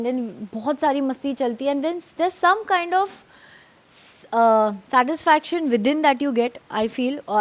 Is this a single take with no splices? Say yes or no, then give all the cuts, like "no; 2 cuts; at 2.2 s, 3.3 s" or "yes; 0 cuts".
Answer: yes; 0 cuts